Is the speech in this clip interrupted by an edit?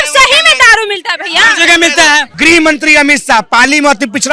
yes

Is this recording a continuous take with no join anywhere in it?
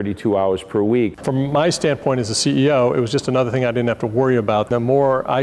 no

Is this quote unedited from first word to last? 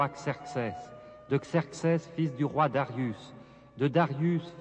yes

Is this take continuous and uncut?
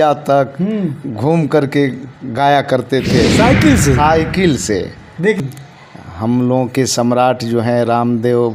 no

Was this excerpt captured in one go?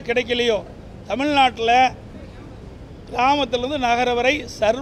yes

